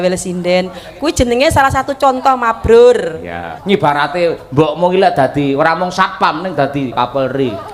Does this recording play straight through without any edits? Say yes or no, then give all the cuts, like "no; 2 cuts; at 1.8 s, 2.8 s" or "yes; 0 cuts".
no; 2 cuts; at 3.5 s, 6.9 s